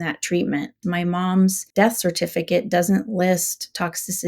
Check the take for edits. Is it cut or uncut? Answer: cut